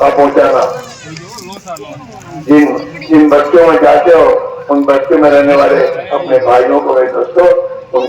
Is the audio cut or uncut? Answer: uncut